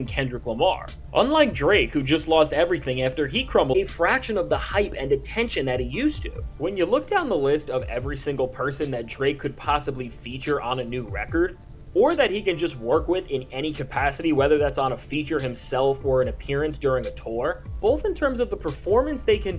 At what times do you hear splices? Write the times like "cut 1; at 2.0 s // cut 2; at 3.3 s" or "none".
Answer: cut 1; at 3.7 s